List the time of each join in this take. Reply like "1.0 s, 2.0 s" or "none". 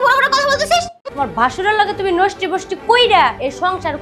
1.0 s